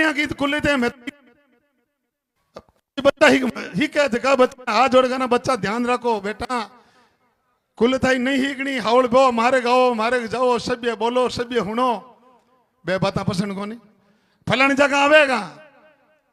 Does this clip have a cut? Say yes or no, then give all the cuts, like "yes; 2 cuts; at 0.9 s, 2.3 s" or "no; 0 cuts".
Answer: no; 0 cuts